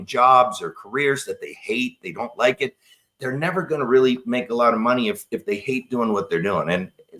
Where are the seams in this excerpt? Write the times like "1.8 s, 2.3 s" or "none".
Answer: none